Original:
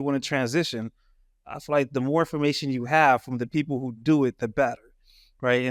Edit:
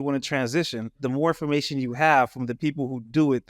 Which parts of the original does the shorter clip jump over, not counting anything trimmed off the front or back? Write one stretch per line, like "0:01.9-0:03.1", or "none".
0:01.0-0:01.9